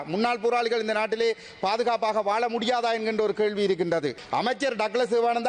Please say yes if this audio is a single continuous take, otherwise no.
no